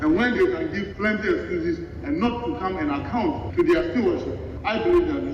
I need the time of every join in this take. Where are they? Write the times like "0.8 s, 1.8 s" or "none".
0.9 s